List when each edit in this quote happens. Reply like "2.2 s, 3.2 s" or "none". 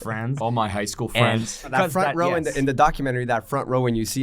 1.7 s